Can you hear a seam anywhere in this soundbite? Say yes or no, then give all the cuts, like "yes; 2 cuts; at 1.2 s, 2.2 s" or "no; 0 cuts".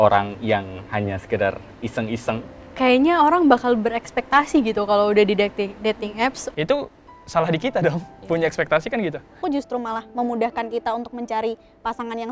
yes; 3 cuts; at 2.5 s, 6.4 s, 9.4 s